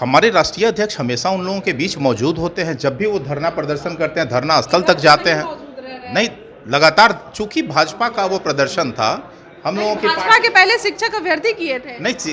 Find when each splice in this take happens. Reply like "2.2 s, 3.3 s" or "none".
none